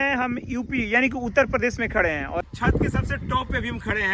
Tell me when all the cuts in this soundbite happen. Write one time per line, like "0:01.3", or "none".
0:02.4